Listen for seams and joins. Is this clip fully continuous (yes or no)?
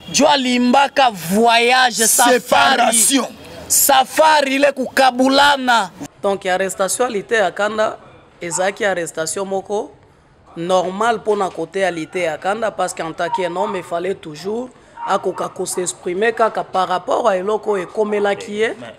no